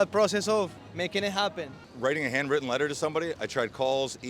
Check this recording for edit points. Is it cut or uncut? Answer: cut